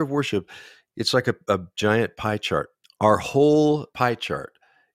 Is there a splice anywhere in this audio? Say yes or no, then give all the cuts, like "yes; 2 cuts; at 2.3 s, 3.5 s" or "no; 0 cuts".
yes; 2 cuts; at 2.8 s, 3.9 s